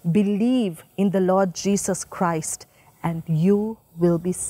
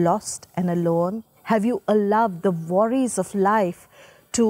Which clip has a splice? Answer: second; 1 cut; at 1.3 s

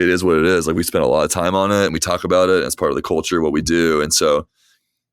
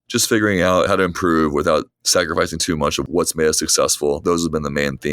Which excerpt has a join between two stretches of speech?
second; 4 cuts; at 0.9 s, 1.9 s, 3.0 s, 4.2 s

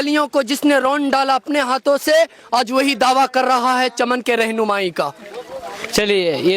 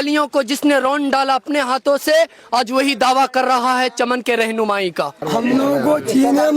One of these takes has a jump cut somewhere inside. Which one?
second; 1 cut; at 5.2 s

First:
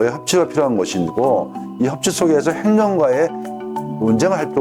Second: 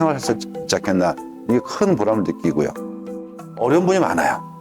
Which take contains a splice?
second; 1 cut; at 3.2 s

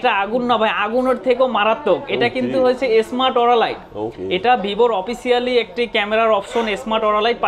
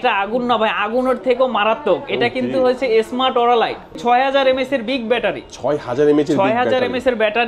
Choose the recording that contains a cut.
second; 1 cut; at 4.0 s

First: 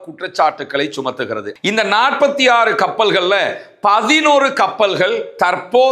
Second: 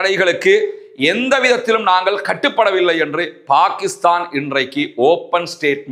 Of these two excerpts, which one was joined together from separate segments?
first; 1 cut; at 1.5 s

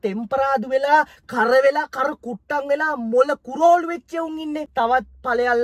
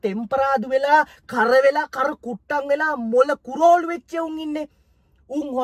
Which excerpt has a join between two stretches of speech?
first; 1 cut; at 4.7 s

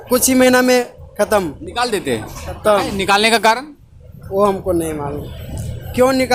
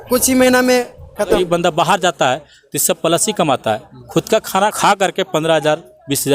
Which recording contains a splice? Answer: second; 2 cuts; at 1.4 s, 4.8 s

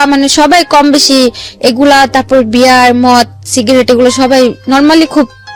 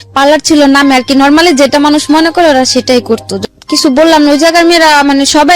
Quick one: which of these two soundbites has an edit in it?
second; 1 cut; at 3.3 s

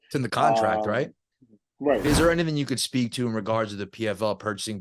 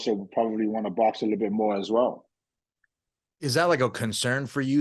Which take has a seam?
first; 1 cut; at 2.1 s

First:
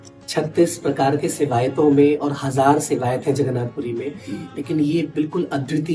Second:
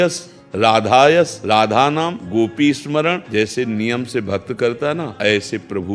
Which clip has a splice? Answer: second; 4 cuts; at 1.4 s, 2.2 s, 3.2 s, 5.1 s

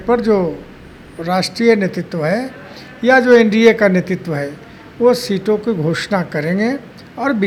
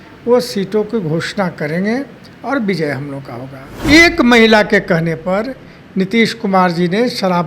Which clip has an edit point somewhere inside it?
second; 1 cut; at 3.6 s

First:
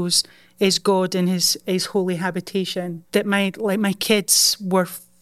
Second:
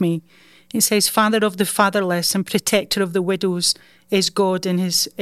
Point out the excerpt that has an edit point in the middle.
first; 1 cut; at 3.0 s

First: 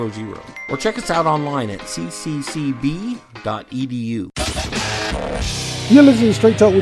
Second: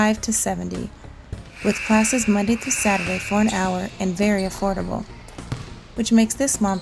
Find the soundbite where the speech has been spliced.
first; 1 cut; at 4.3 s

